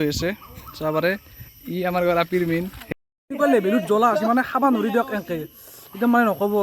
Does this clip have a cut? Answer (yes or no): yes